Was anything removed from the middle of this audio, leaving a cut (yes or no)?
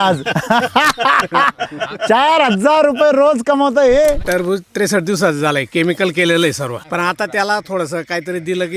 yes